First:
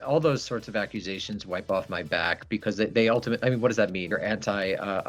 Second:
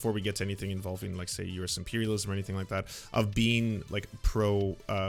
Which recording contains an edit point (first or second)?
first